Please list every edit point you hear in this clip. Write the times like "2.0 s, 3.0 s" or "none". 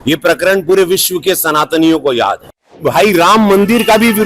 2.8 s